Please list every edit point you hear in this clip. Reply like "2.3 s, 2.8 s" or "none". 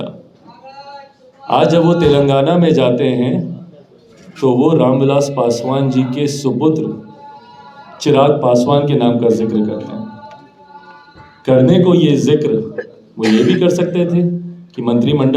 none